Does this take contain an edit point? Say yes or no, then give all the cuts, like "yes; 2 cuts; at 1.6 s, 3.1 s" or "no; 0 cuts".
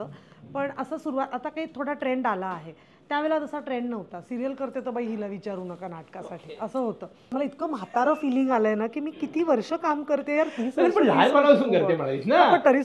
yes; 1 cut; at 7.3 s